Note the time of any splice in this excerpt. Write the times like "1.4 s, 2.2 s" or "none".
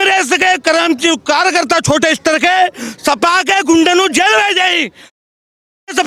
none

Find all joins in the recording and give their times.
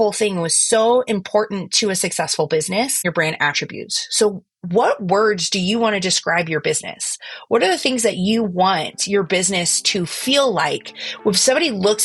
3.0 s

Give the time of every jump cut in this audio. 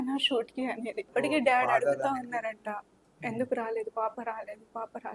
1.1 s

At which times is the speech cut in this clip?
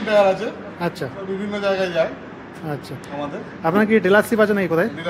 none

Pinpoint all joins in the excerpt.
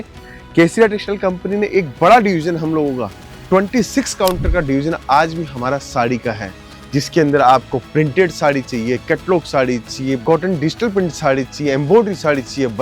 10.2 s

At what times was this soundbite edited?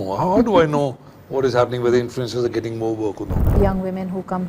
3.6 s

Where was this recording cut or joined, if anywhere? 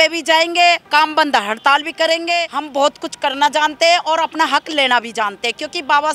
0.8 s, 2.6 s

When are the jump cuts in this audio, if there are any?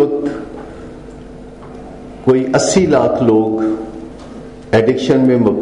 none

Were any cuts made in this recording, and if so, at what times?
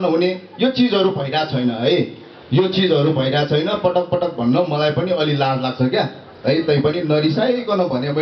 none

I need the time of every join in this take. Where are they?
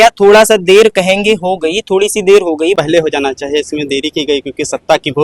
2.8 s

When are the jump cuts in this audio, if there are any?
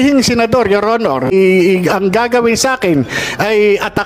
1.3 s

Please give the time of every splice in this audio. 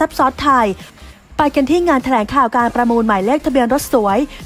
0.9 s

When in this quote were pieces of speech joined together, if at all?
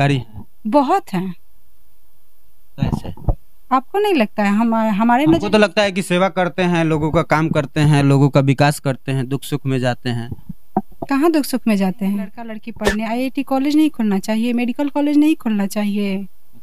12.7 s

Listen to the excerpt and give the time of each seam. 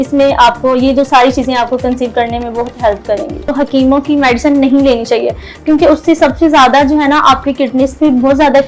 3.5 s

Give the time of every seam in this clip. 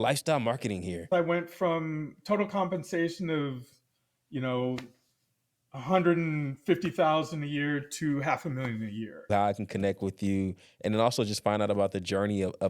1.1 s, 9.3 s

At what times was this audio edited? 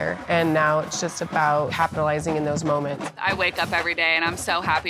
1.7 s, 3.1 s

